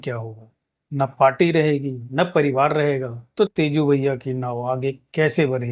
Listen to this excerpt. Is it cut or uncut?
uncut